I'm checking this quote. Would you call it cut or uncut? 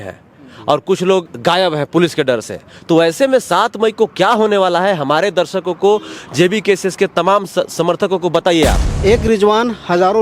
cut